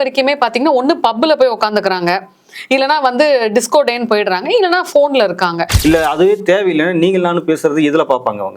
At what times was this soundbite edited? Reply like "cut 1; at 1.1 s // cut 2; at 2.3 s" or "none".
cut 1; at 5.7 s